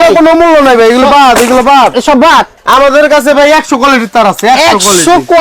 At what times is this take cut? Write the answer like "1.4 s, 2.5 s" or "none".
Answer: 2.5 s